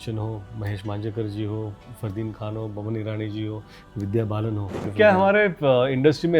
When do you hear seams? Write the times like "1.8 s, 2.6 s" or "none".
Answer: 4.9 s